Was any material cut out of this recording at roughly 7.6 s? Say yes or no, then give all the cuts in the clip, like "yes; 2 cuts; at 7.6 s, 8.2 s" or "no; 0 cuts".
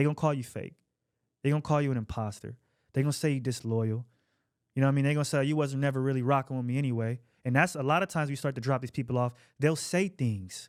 no; 0 cuts